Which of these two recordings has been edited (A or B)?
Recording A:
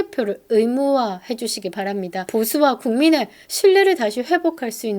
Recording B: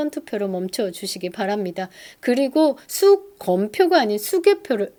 A